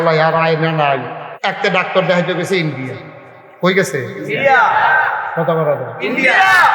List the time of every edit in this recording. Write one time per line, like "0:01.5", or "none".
0:01.3